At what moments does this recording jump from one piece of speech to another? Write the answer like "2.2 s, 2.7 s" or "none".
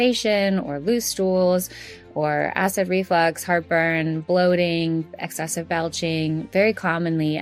none